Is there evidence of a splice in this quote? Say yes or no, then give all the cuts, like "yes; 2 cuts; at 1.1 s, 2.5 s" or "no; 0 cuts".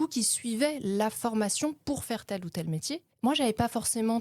yes; 1 cut; at 3.1 s